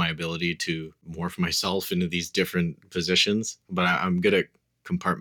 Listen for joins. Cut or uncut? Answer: cut